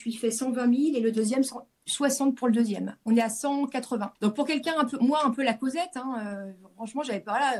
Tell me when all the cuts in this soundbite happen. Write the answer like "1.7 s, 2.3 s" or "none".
3.0 s, 4.1 s